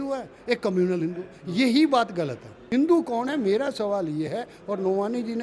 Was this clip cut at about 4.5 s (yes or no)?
no